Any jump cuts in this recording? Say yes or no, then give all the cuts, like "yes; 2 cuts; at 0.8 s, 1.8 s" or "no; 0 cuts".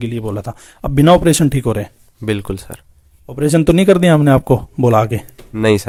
no; 0 cuts